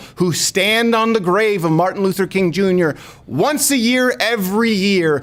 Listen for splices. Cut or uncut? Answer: uncut